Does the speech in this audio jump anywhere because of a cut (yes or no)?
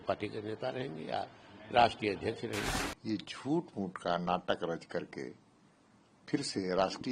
yes